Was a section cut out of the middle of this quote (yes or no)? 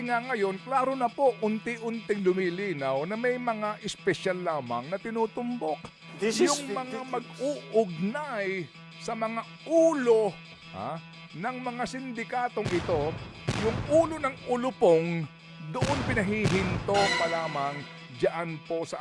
no